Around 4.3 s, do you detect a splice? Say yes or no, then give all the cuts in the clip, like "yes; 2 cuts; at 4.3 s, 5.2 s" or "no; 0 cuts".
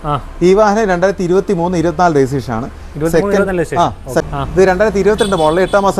yes; 1 cut; at 4.3 s